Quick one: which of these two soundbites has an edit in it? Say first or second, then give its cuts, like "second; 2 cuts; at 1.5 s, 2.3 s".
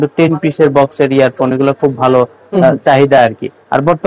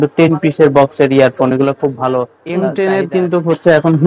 second; 1 cut; at 2.4 s